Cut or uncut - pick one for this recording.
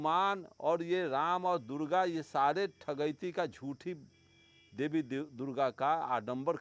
uncut